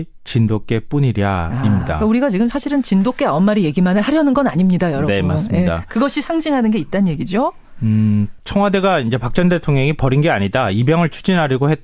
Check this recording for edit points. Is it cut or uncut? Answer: uncut